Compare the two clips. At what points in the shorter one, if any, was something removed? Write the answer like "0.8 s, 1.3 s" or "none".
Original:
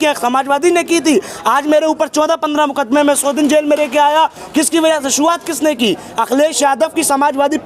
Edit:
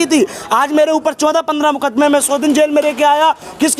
none

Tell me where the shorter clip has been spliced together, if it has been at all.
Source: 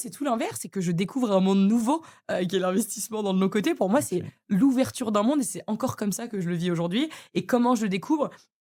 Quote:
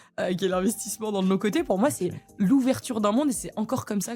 none

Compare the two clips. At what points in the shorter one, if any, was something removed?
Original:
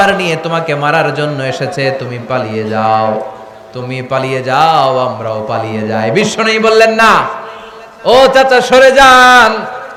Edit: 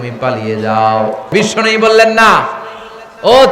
1.3 s

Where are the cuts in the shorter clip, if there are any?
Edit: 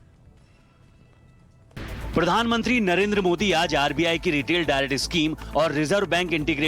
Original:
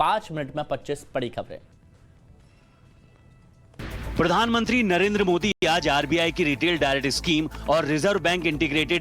3.5 s

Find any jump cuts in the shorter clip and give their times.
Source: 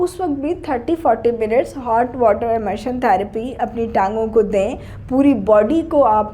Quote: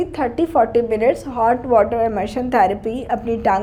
none

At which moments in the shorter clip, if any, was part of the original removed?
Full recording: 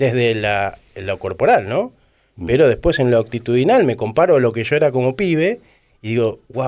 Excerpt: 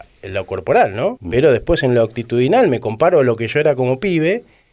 1.2 s

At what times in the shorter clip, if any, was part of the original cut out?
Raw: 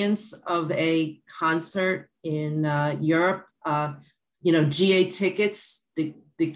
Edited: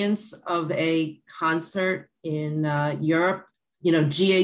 3.5 s

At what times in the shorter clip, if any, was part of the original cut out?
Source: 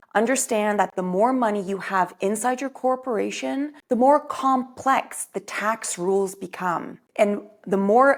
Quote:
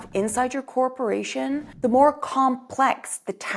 none

